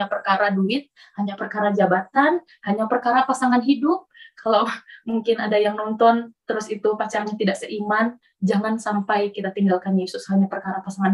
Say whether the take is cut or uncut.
uncut